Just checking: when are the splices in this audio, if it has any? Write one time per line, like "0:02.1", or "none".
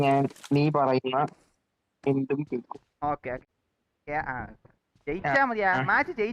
0:03.4